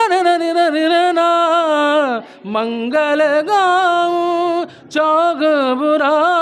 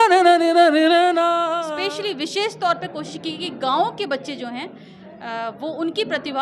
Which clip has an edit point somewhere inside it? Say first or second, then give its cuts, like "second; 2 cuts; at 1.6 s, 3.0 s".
second; 1 cut; at 1.6 s